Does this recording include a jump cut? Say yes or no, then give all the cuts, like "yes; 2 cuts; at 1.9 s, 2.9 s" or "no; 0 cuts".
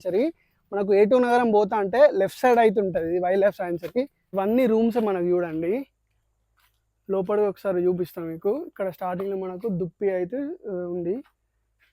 yes; 1 cut; at 4.2 s